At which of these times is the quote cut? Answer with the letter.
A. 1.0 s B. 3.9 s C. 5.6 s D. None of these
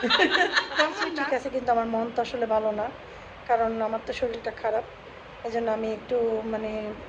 A